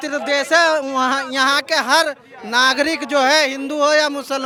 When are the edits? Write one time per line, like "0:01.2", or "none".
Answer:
none